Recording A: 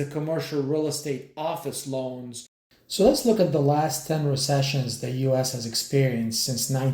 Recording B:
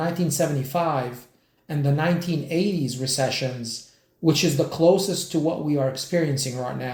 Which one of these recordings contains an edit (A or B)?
A